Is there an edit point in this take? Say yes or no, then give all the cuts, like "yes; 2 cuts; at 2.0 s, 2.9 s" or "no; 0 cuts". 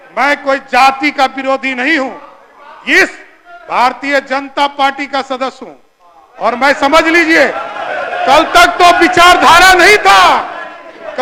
no; 0 cuts